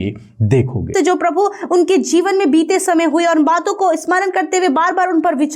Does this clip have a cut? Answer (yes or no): yes